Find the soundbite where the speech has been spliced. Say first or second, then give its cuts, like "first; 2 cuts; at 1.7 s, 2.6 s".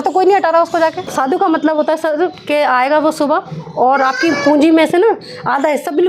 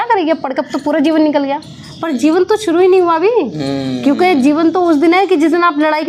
first; 1 cut; at 1.1 s